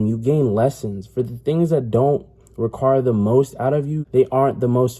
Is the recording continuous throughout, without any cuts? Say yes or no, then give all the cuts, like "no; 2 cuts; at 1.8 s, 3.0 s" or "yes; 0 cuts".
no; 1 cut; at 4.0 s